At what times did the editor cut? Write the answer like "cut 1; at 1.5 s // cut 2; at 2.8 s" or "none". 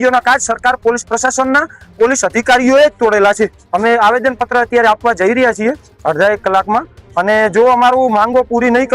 none

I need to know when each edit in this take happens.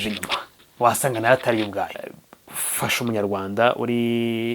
cut 1; at 2.0 s

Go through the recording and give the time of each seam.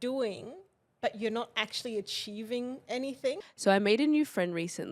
cut 1; at 3.4 s

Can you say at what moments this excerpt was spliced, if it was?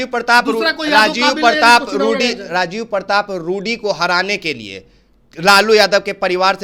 none

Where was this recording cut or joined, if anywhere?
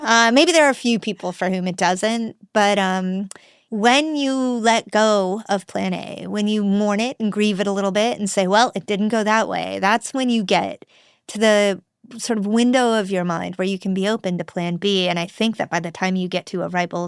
cut 1; at 3.6 s

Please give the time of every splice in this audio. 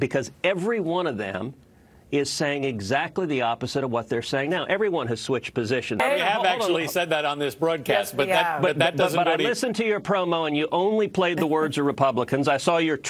cut 1; at 6.0 s

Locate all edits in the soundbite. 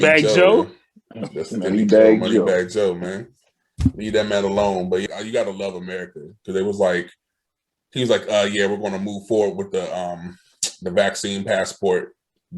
cut 1; at 5.0 s

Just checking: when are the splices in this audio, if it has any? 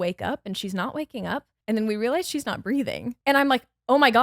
cut 1; at 1.5 s // cut 2; at 3.1 s

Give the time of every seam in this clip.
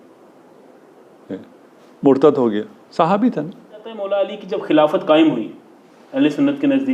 cut 1; at 4.0 s

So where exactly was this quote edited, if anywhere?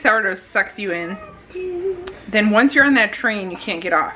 none

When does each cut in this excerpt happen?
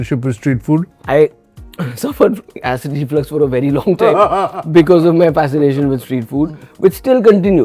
cut 1; at 2.6 s

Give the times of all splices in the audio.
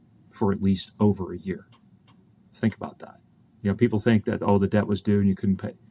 none

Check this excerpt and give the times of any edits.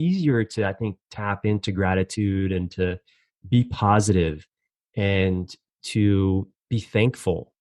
cut 1; at 6.6 s

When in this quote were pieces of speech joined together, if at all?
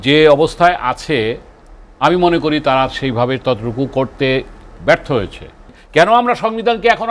cut 1; at 5.7 s

